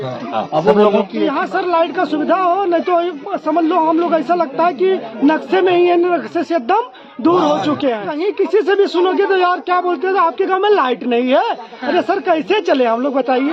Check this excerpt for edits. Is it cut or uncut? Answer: cut